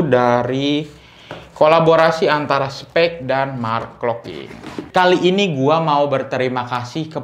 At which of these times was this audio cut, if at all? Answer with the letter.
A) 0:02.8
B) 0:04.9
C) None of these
B